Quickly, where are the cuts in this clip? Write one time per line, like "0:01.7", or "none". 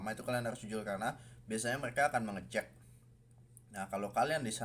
none